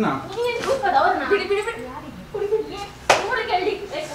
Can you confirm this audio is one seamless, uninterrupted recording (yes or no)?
yes